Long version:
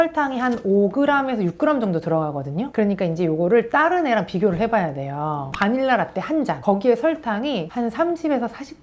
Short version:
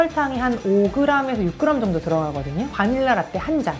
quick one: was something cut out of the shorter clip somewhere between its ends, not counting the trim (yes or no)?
yes